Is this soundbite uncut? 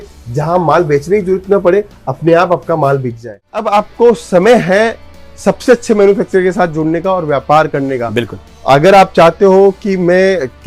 no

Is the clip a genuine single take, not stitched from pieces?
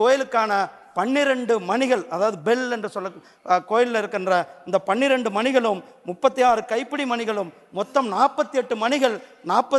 yes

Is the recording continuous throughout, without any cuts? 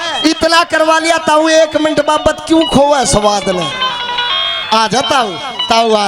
yes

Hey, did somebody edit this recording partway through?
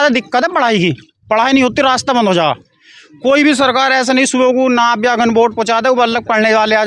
no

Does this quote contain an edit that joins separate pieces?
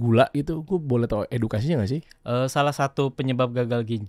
no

